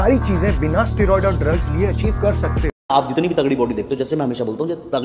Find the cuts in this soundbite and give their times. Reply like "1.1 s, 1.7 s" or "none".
2.7 s